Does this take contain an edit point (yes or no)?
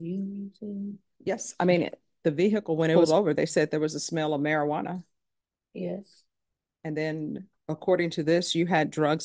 yes